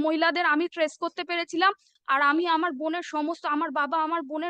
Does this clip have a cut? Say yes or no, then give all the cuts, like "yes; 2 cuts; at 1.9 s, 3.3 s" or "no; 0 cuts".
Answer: yes; 1 cut; at 1.9 s